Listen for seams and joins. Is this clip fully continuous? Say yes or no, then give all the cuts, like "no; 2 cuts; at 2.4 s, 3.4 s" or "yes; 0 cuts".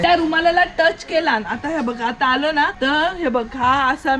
yes; 0 cuts